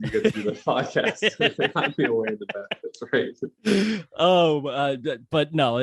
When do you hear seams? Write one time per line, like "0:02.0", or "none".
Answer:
none